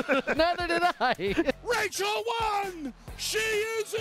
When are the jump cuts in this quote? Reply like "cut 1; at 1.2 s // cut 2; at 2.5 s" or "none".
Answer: cut 1; at 1.5 s